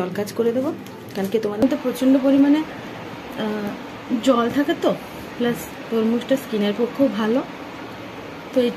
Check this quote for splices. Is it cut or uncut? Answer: cut